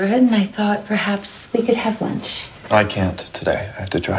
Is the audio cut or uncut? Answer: uncut